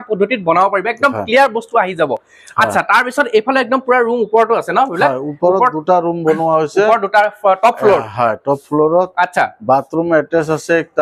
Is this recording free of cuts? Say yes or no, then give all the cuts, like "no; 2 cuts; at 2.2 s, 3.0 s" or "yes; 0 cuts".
yes; 0 cuts